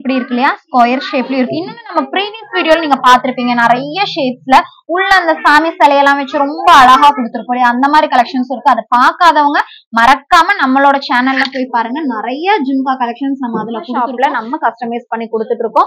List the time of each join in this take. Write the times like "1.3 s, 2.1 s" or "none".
13.9 s